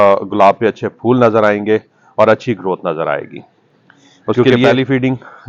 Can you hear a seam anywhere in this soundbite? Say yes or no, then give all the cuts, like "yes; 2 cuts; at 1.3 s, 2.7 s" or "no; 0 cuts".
yes; 1 cut; at 4.5 s